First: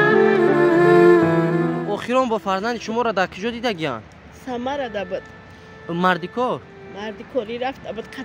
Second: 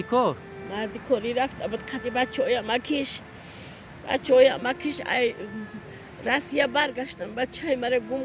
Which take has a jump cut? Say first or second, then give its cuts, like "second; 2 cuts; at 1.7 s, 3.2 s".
first; 1 cut; at 1.8 s